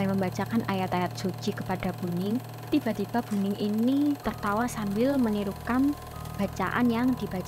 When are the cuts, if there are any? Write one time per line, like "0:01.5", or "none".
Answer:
none